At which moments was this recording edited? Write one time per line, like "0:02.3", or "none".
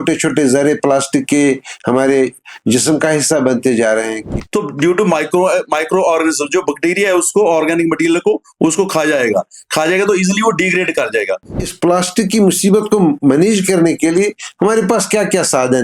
0:04.2
0:11.6